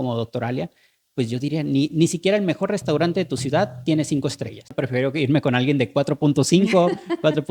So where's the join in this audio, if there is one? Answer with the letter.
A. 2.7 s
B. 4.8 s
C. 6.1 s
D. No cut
B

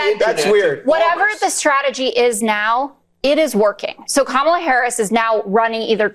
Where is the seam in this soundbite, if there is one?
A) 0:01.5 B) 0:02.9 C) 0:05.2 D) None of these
D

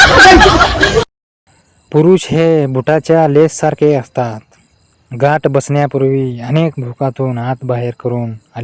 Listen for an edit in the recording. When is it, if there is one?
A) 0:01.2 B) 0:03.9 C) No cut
A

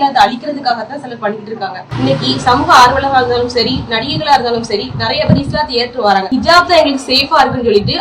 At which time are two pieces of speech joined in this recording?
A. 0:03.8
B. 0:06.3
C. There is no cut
B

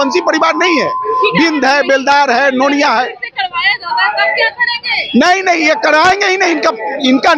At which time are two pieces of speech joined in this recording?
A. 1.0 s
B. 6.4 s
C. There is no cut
C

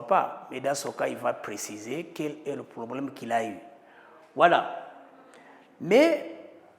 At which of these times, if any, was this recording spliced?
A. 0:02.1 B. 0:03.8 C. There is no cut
C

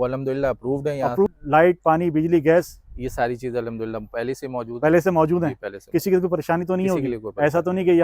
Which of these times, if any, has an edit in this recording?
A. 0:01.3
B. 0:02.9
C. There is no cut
A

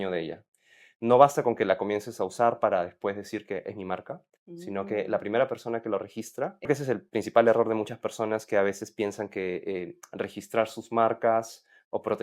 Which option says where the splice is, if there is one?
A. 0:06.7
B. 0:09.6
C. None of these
A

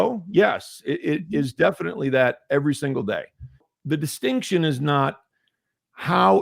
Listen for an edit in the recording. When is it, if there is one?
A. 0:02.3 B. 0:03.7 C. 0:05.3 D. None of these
B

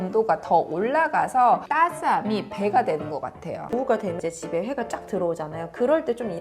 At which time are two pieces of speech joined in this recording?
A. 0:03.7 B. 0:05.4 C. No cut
A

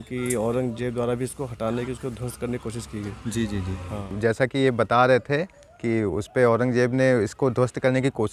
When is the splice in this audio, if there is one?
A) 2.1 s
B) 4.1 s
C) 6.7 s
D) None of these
B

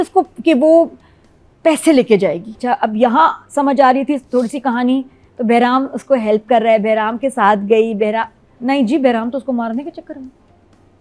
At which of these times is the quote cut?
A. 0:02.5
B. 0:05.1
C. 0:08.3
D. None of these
A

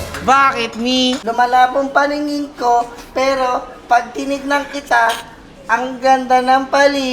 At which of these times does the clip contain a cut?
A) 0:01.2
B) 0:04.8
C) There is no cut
A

